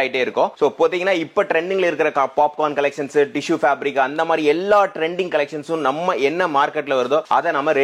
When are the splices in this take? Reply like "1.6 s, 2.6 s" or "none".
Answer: none